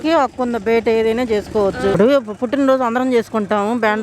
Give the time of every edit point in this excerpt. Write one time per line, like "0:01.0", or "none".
0:01.9

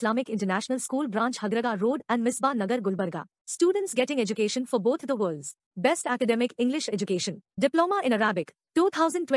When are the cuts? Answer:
none

